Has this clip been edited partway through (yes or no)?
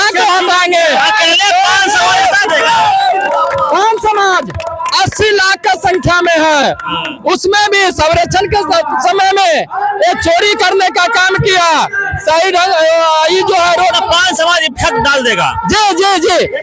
no